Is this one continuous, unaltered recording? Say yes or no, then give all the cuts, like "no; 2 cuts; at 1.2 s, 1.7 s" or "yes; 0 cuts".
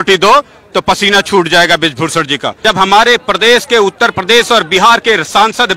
no; 1 cut; at 2.6 s